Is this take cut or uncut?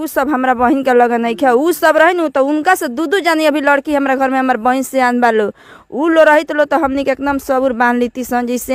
uncut